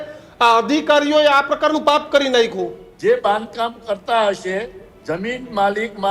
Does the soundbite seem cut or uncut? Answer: cut